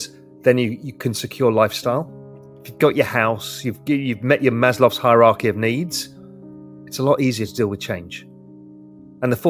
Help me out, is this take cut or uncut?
uncut